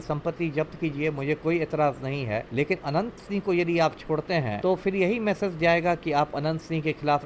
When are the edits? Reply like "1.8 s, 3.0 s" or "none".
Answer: 2.5 s, 4.5 s